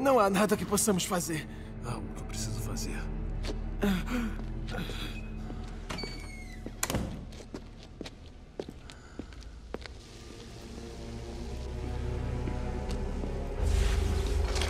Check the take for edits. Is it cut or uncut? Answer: cut